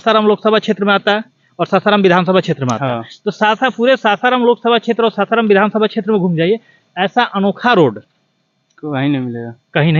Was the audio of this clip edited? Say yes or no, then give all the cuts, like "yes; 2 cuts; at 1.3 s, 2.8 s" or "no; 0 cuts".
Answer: no; 0 cuts